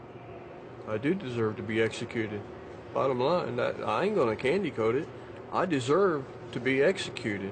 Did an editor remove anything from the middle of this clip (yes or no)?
no